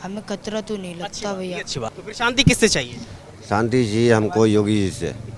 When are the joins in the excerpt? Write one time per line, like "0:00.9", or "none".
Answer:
0:02.0